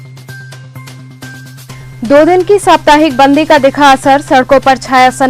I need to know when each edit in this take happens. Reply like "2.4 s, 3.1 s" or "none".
1.4 s